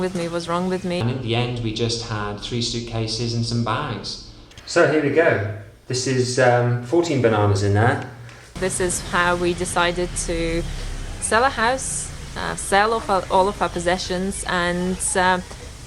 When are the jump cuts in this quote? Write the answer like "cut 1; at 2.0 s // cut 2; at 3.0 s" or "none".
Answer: cut 1; at 1.0 s // cut 2; at 4.6 s // cut 3; at 8.6 s